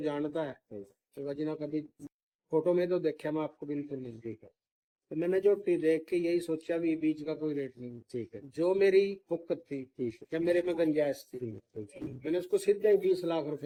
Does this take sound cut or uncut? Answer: uncut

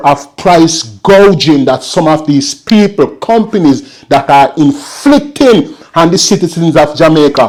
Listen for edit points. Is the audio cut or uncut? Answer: uncut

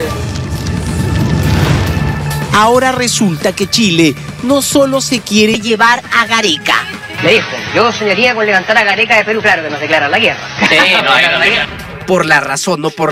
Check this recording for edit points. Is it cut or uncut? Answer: uncut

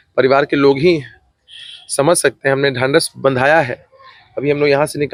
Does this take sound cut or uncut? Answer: uncut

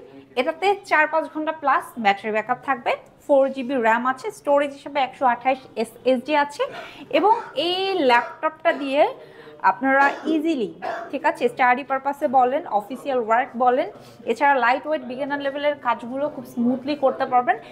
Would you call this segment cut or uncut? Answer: uncut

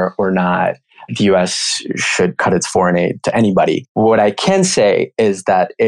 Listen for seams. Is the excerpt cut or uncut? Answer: cut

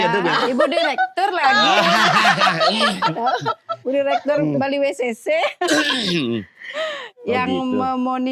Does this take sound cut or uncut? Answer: uncut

